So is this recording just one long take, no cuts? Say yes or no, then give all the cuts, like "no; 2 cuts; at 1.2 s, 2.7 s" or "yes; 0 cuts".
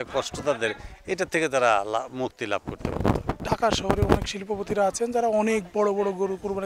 yes; 0 cuts